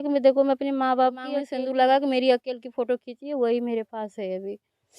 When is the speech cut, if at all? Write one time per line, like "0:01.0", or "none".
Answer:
0:01.3